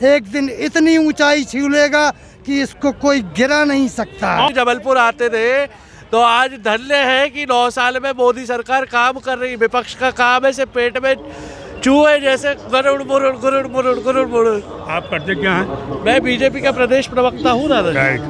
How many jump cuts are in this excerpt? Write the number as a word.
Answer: one